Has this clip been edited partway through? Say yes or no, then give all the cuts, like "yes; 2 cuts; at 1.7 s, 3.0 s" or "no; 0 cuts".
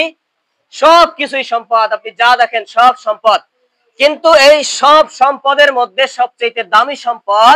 no; 0 cuts